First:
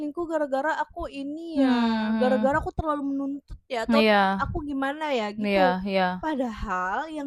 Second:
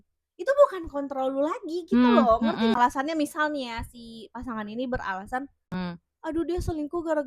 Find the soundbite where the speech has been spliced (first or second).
second